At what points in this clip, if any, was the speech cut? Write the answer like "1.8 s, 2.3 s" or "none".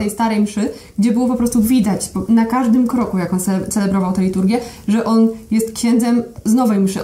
none